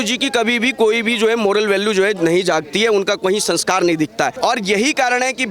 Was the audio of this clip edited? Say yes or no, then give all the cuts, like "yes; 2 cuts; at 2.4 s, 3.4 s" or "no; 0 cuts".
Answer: yes; 1 cut; at 4.3 s